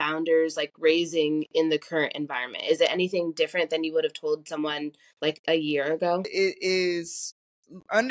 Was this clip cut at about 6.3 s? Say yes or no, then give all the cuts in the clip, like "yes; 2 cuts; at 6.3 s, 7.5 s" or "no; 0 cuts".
yes; 1 cut; at 6.3 s